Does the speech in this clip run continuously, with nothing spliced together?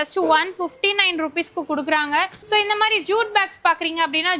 no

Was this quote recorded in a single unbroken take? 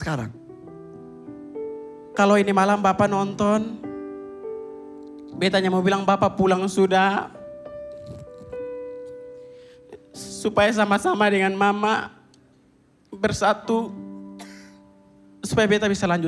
yes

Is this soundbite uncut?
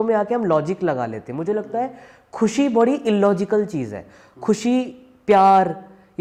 yes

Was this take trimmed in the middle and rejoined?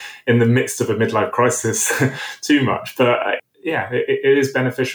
yes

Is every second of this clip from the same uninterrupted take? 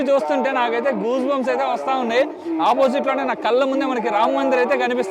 yes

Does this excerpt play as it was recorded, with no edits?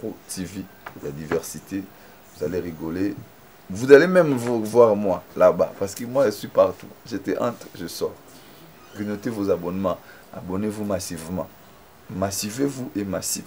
yes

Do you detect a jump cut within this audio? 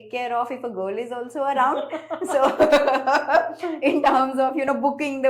no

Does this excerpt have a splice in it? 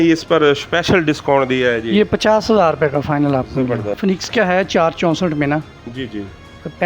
yes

